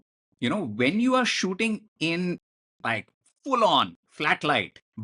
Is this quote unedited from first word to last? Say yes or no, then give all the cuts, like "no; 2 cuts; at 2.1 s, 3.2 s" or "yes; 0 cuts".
yes; 0 cuts